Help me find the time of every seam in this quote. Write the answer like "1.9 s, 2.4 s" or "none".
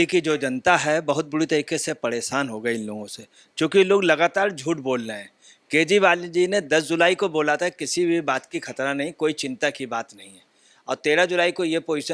none

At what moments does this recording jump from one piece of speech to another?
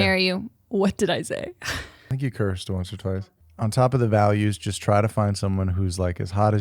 1.9 s, 2.8 s

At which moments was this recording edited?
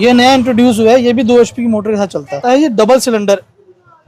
2.4 s

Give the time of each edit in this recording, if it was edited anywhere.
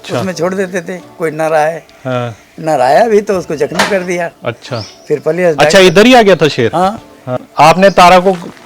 4.4 s, 7.4 s

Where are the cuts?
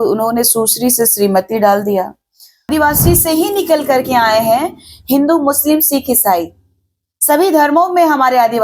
2.7 s

